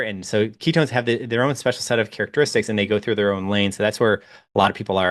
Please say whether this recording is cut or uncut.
uncut